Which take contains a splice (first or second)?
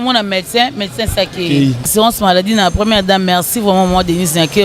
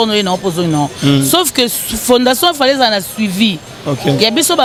first